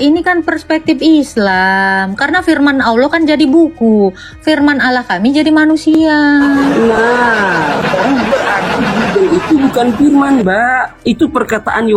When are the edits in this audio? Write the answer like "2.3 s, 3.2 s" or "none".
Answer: 8.3 s